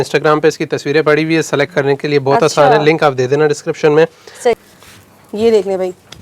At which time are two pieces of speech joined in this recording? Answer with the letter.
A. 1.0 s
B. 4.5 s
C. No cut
B